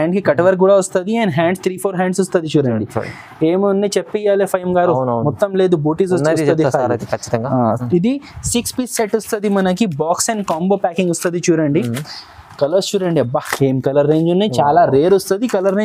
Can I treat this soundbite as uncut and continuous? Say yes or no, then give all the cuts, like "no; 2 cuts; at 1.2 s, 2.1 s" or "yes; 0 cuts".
yes; 0 cuts